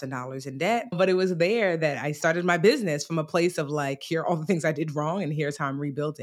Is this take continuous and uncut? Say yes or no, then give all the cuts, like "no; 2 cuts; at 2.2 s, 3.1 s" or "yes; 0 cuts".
no; 2 cuts; at 0.9 s, 2.2 s